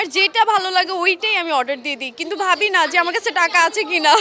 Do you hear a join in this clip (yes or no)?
no